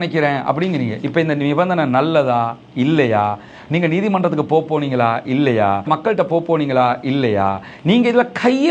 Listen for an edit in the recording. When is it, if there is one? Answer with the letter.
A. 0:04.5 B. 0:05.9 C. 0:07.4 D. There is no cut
B